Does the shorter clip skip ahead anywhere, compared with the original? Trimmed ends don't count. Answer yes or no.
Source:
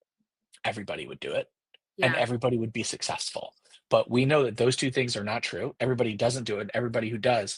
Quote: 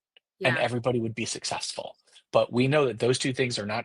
no